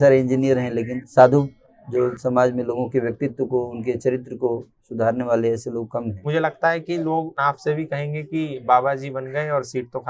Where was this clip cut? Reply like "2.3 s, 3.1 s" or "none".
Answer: 1.0 s, 2.2 s, 6.2 s, 7.3 s